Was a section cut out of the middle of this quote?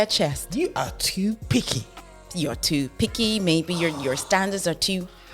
no; 0 cuts

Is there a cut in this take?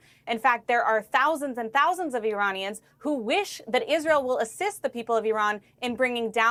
no; 0 cuts

